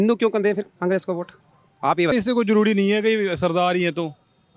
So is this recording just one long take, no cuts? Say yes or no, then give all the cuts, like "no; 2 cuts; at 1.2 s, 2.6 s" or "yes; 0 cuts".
no; 1 cut; at 2.1 s